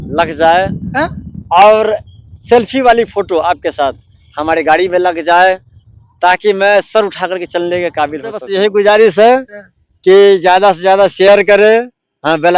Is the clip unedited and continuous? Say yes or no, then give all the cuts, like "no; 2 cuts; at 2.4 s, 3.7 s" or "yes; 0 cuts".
no; 1 cut; at 8.4 s